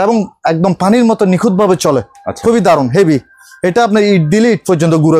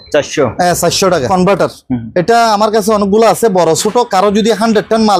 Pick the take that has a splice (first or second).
second